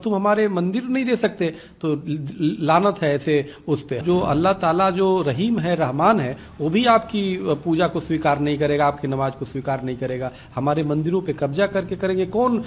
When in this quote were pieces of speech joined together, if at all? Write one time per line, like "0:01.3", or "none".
0:04.0